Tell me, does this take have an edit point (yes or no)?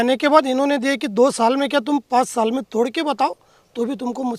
no